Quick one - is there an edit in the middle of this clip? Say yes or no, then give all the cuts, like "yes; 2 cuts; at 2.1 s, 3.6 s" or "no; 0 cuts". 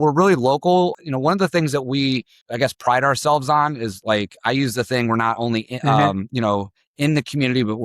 yes; 2 cuts; at 1.0 s, 2.4 s